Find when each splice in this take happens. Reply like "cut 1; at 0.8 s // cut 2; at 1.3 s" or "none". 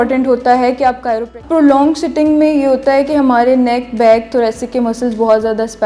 cut 1; at 1.3 s